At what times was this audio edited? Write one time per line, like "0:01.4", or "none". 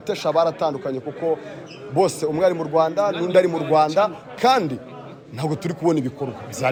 none